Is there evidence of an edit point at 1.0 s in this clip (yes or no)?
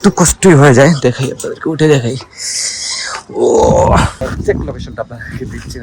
no